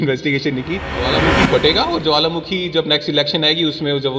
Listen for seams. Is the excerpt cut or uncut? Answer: cut